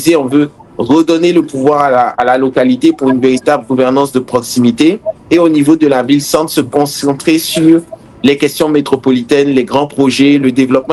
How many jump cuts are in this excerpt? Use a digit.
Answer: 0